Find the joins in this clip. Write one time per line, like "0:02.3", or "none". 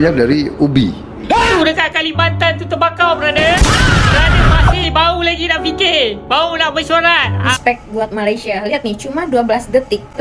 0:01.5
0:07.6